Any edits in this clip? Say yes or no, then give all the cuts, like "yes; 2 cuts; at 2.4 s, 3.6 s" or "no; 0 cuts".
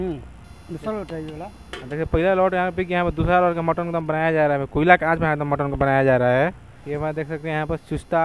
yes; 1 cut; at 6.7 s